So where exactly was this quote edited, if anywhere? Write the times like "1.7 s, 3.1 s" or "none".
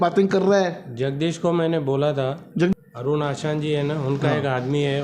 2.7 s